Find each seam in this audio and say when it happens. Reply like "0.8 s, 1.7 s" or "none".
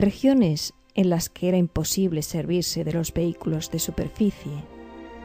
none